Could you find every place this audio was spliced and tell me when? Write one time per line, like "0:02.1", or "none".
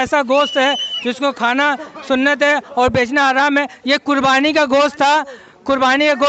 none